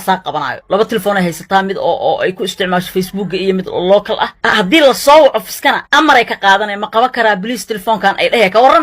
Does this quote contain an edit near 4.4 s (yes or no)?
yes